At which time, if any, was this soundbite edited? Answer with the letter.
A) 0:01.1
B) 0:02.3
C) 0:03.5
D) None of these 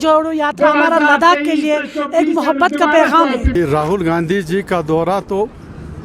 C